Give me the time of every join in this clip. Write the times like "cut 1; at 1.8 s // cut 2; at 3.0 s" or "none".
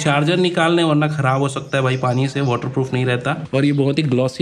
cut 1; at 3.5 s